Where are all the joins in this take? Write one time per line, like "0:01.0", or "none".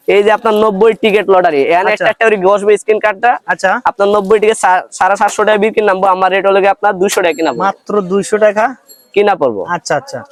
none

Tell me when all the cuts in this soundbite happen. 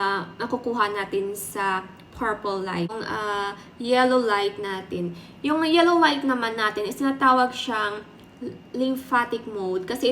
0:03.0

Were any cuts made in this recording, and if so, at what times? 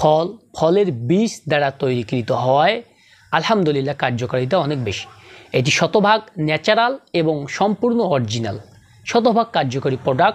none

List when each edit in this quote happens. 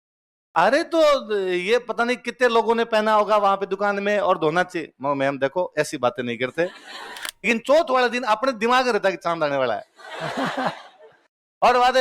0:07.3

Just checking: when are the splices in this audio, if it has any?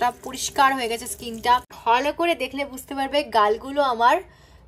0:01.7

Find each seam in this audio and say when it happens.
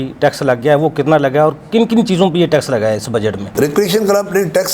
none

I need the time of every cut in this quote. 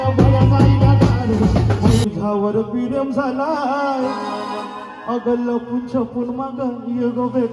0:02.1

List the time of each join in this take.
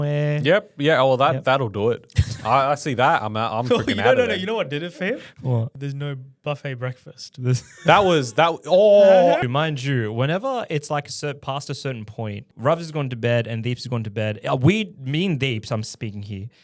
0:05.7
0:09.4
0:12.5

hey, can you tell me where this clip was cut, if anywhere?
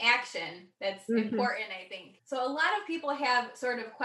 0:02.1

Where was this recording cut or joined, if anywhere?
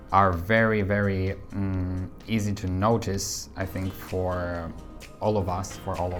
none

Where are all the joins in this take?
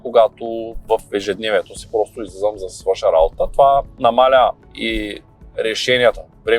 0:03.9
0:04.7

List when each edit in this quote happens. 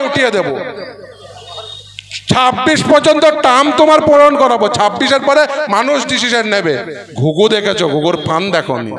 0:07.0

